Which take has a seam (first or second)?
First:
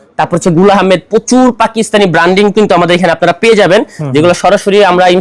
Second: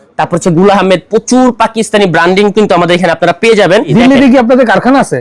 second